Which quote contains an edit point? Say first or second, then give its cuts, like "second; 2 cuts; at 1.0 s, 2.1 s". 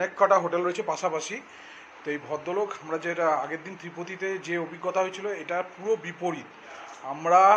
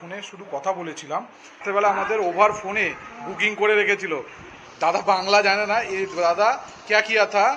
second; 1 cut; at 1.6 s